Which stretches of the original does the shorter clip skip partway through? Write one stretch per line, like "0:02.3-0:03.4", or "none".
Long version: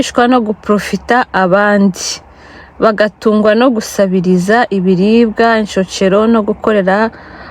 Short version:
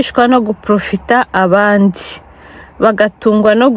none